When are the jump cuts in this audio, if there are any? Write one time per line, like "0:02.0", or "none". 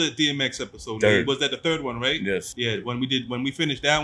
0:02.5